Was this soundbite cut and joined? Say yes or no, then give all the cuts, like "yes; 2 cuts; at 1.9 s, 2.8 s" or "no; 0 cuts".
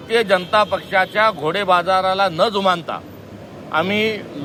no; 0 cuts